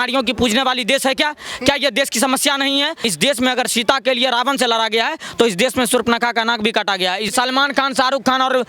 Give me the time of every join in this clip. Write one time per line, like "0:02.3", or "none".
0:03.1
0:07.3